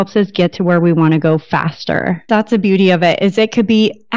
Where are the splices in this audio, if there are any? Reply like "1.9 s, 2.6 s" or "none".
2.3 s